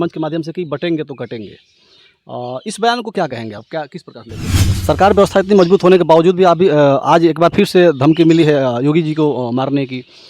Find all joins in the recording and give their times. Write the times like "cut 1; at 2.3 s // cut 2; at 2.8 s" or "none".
cut 1; at 4.7 s